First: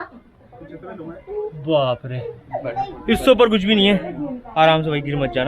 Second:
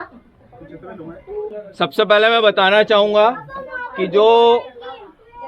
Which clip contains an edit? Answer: second; 1 cut; at 1.5 s

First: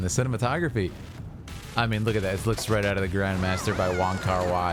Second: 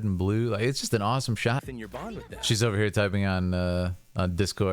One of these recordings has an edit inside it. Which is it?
second; 1 cut; at 1.6 s

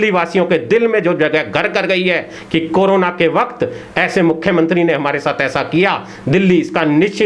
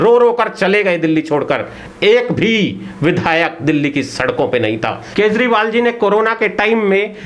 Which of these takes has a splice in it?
second; 1 cut; at 5.0 s

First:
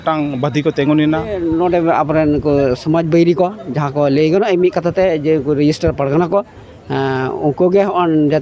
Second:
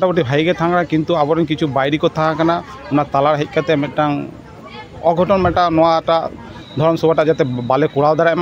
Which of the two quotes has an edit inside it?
first; 1 cut; at 1.4 s

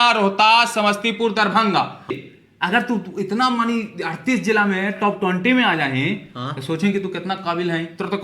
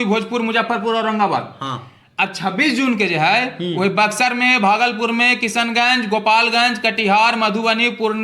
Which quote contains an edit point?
first; 1 cut; at 2.3 s

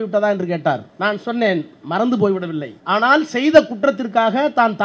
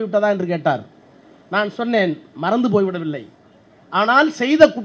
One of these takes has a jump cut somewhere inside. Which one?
first; 2 cuts; at 0.9 s, 2.7 s

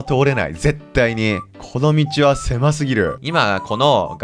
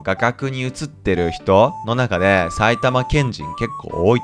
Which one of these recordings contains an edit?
first; 2 cuts; at 1.6 s, 3.2 s

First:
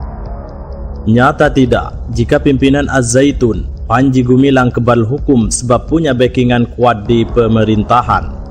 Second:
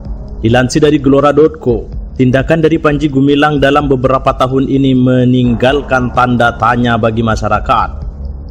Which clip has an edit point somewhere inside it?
first; 1 cut; at 1.0 s

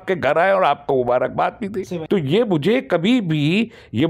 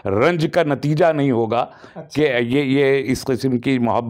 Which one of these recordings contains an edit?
first; 1 cut; at 1.9 s

